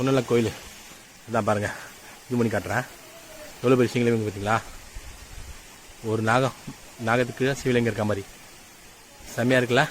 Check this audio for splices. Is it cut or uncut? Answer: uncut